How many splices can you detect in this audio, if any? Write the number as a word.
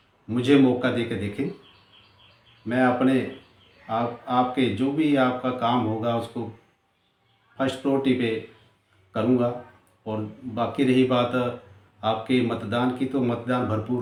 zero